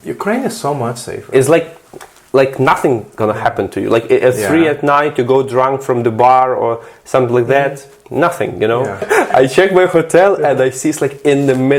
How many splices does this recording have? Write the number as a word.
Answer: one